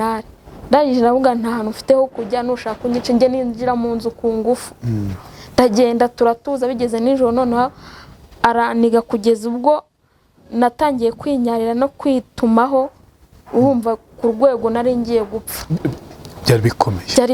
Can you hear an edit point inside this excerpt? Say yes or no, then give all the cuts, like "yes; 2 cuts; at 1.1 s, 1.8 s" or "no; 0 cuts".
no; 0 cuts